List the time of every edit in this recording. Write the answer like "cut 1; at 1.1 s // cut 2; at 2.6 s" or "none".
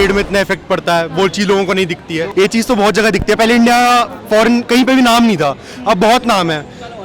cut 1; at 2.3 s